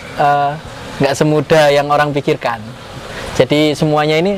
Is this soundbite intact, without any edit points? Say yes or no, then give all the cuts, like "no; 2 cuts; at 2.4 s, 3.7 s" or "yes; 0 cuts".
yes; 0 cuts